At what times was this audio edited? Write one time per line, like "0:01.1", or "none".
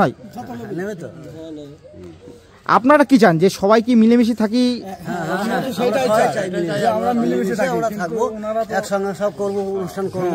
none